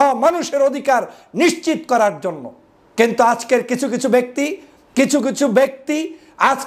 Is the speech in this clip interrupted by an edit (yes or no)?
no